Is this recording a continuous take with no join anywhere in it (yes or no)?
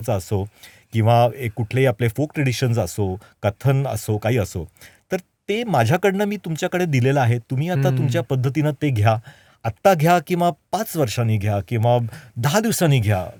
yes